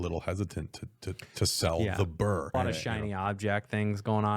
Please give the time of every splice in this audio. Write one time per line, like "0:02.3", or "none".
0:02.5